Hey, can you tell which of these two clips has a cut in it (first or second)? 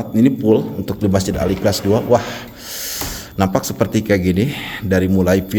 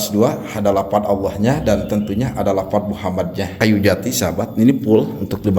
second